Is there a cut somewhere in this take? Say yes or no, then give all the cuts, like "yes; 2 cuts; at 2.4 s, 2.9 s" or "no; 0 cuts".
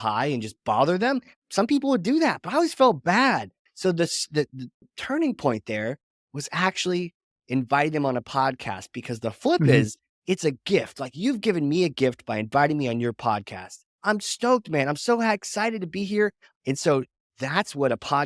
yes; 2 cuts; at 3.6 s, 16.5 s